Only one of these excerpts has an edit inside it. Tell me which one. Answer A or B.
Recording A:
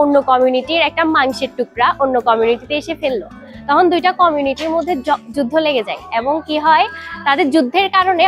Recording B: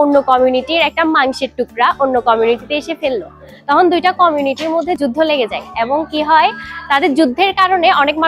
B